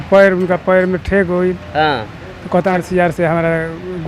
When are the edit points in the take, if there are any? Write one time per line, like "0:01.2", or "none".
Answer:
0:02.7